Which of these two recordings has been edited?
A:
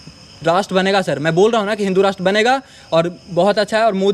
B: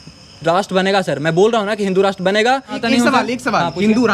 B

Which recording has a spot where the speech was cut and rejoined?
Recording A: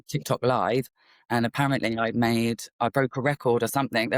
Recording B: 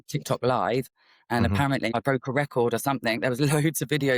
B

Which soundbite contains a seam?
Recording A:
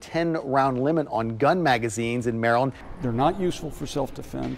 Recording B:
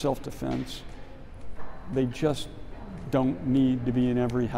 A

